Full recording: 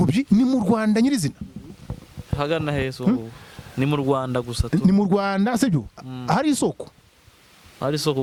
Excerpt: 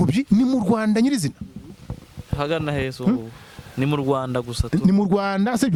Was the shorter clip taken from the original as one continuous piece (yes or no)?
yes